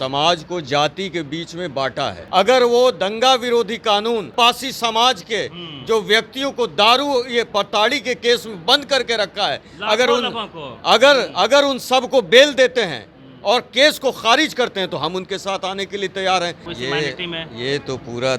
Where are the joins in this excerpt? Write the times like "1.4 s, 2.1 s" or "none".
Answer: 2.2 s, 4.3 s, 16.7 s